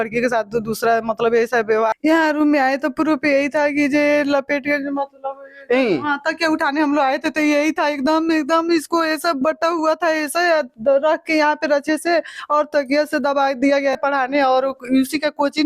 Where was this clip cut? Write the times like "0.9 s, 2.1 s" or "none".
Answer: 2.0 s, 14.0 s

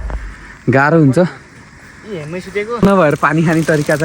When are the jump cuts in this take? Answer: 2.7 s

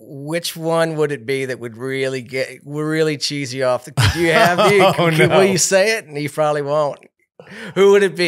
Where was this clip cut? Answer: none

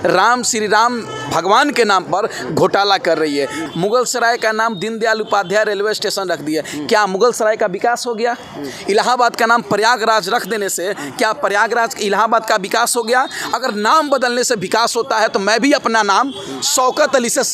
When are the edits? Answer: 3.6 s

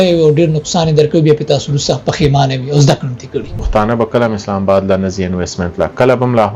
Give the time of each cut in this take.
3.6 s

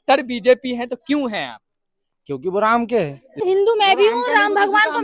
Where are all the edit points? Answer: 3.4 s

